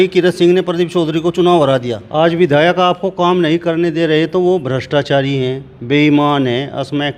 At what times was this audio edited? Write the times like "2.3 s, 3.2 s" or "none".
2.0 s